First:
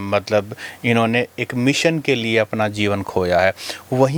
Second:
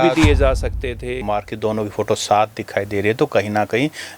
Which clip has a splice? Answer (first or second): second